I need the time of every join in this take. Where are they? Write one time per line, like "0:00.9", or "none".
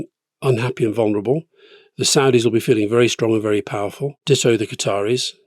0:04.1